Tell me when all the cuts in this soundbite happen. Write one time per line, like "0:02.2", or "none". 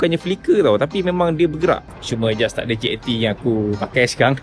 0:01.9